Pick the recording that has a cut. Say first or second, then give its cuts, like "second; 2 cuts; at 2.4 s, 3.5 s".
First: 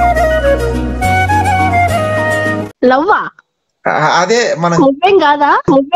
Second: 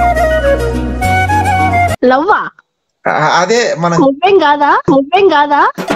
second; 1 cut; at 1.9 s